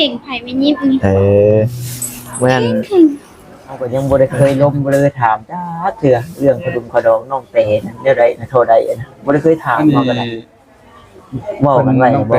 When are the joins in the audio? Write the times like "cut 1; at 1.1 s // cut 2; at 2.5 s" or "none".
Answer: cut 1; at 3.9 s